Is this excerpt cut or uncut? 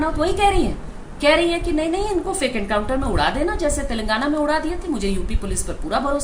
uncut